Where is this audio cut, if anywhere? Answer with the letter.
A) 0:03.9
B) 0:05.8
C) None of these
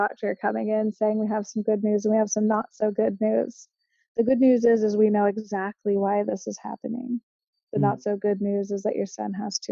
C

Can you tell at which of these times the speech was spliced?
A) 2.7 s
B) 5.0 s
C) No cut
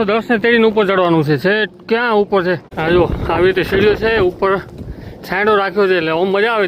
A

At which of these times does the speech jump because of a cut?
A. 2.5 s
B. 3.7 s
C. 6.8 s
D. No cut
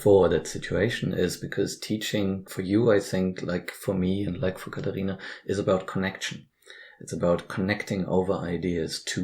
A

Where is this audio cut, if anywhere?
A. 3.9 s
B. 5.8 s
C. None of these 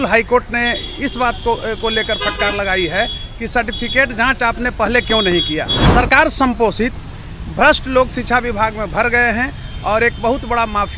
B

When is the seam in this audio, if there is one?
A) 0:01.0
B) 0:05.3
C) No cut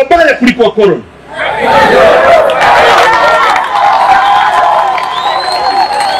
C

